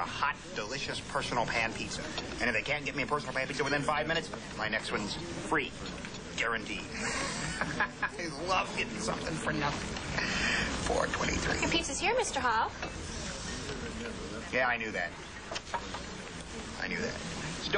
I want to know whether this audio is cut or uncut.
uncut